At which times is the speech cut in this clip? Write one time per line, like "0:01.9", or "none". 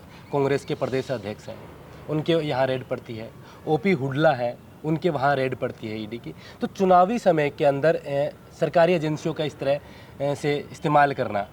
none